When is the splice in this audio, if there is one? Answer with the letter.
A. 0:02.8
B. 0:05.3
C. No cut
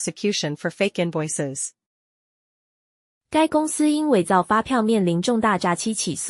C